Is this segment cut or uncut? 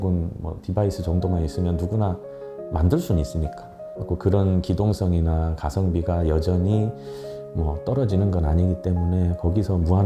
uncut